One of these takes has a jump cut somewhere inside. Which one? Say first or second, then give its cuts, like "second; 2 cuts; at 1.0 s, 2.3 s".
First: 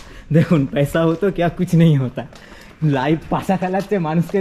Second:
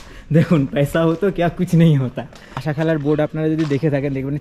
second; 1 cut; at 2.6 s